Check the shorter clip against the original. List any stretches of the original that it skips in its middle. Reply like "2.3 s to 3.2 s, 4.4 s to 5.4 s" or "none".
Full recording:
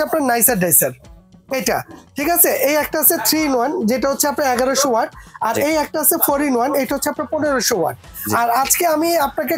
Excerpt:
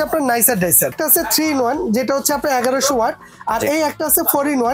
0.9 s to 2.9 s